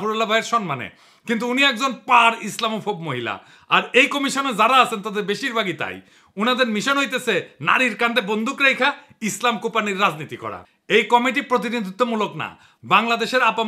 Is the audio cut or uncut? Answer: cut